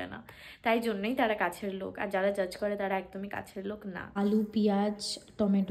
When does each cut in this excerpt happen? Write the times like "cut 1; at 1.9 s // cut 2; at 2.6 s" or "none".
cut 1; at 4.1 s